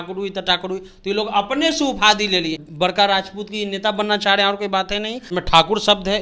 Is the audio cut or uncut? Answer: cut